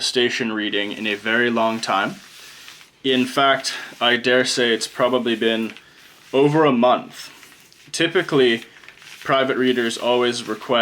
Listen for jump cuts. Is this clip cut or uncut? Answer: uncut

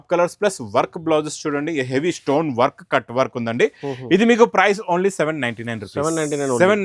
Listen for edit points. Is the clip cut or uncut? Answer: uncut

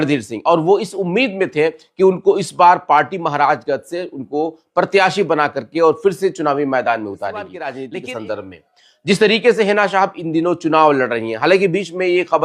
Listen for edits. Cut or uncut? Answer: cut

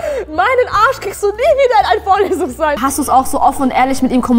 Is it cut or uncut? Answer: cut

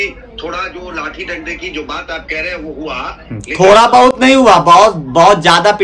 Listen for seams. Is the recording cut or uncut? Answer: uncut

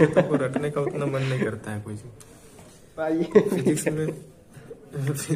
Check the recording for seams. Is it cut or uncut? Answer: uncut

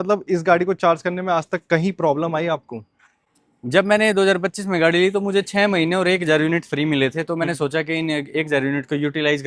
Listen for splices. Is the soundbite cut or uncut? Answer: uncut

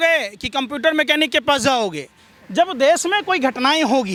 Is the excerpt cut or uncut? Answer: uncut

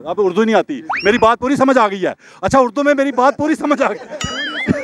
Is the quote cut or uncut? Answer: uncut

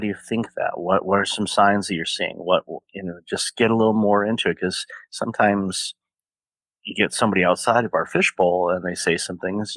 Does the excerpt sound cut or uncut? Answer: uncut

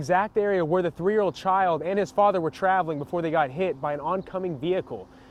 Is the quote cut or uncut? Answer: uncut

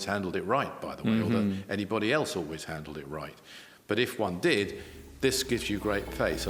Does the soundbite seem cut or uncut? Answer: uncut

